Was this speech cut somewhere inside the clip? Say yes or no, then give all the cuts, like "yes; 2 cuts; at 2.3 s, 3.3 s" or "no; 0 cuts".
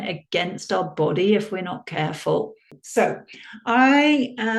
yes; 1 cut; at 2.8 s